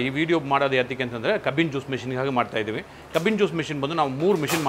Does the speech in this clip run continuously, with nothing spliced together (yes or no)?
yes